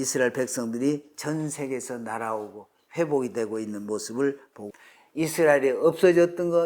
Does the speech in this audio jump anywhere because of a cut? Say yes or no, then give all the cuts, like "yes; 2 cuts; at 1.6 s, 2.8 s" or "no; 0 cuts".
yes; 1 cut; at 4.6 s